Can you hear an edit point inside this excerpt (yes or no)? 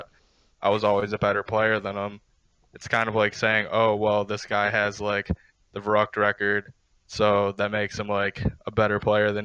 no